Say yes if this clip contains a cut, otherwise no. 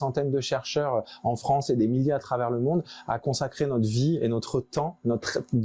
no